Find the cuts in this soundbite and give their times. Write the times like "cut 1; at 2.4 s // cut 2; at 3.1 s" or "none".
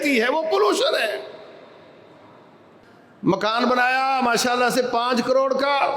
cut 1; at 2.8 s